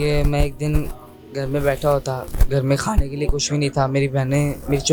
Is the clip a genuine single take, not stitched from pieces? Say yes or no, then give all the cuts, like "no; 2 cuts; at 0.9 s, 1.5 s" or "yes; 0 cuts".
yes; 0 cuts